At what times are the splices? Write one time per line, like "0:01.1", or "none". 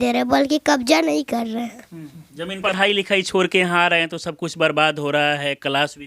0:02.7